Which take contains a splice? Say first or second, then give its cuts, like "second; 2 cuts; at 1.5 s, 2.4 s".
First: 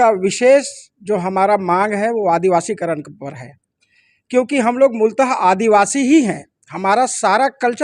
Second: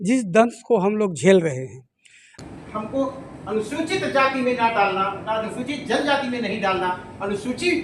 second; 1 cut; at 2.3 s